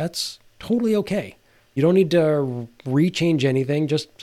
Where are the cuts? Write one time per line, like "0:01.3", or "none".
0:01.7